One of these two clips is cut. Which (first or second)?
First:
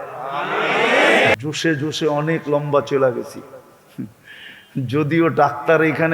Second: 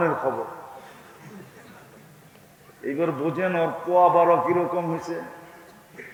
first